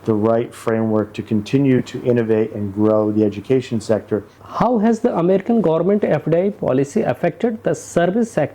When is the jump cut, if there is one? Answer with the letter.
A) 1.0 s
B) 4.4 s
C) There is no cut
B